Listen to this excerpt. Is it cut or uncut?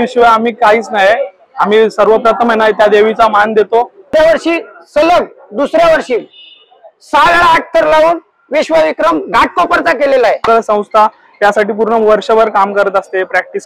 cut